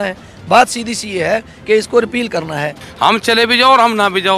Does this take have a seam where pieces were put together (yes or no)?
yes